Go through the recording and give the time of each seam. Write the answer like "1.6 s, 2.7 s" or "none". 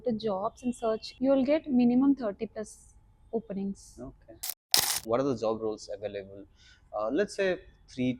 1.1 s, 4.8 s